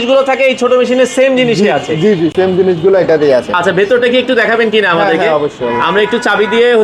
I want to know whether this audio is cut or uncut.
uncut